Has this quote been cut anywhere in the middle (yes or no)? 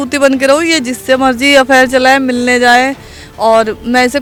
no